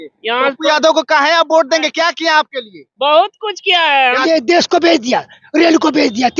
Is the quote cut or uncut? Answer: cut